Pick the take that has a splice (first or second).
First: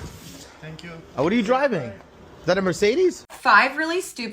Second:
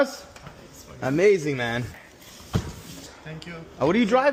first